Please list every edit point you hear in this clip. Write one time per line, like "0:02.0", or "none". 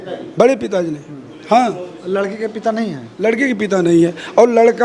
none